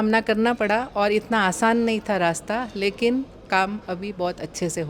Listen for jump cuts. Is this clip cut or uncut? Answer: uncut